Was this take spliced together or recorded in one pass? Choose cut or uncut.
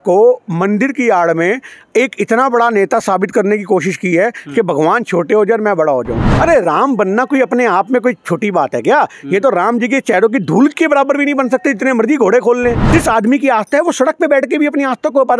cut